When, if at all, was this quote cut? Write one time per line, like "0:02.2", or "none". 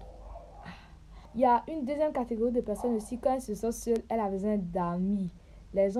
none